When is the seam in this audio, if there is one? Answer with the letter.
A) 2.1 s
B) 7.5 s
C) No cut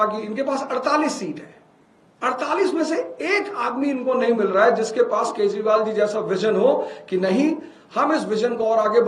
C